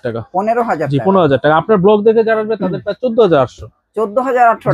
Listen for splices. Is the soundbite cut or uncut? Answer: uncut